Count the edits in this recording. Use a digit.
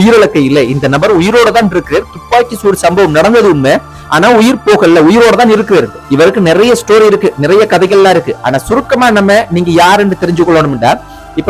1